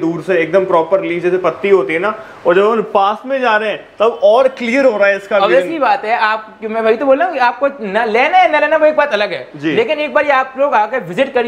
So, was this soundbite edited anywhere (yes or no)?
no